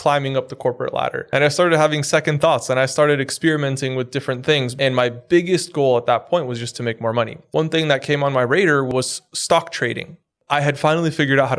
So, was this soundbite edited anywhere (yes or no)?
yes